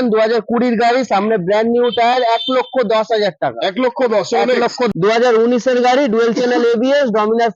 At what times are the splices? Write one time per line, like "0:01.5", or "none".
0:04.9

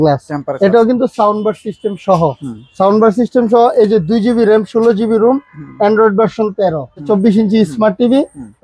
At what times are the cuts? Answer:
0:07.1

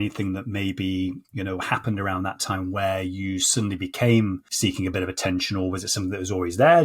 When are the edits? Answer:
0:04.5

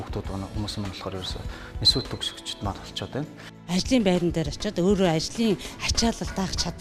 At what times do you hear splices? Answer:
0:03.5

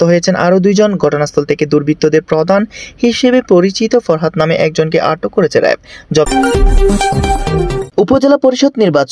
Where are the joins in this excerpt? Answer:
0:06.3
0:07.9

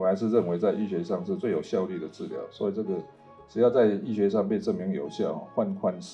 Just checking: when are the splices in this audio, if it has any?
0:01.4

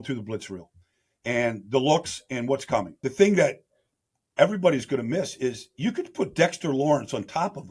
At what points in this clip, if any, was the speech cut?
0:03.0

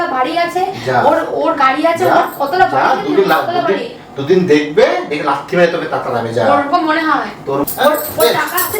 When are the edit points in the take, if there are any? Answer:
0:07.6

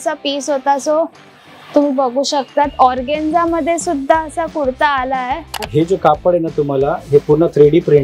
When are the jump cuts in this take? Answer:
0:05.7

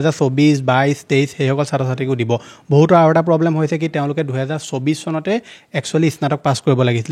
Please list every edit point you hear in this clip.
none

